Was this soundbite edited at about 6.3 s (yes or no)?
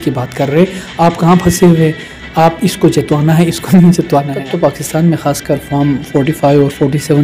no